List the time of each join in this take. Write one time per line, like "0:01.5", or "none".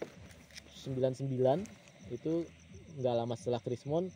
none